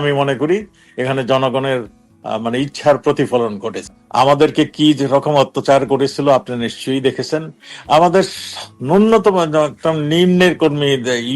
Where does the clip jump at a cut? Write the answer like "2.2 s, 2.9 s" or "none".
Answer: 4.0 s